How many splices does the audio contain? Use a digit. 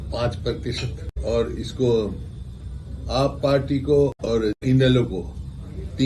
2